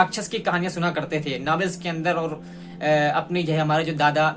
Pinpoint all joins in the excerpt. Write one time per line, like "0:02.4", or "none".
none